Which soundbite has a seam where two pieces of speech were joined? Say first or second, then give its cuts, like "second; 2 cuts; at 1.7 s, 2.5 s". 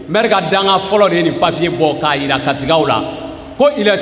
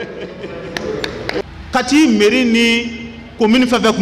second; 1 cut; at 1.4 s